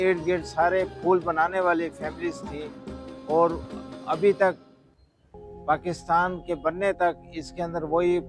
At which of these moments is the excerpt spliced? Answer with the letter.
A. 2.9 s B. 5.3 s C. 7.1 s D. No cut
D